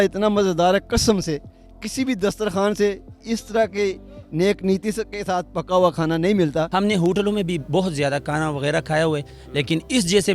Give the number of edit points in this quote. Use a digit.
1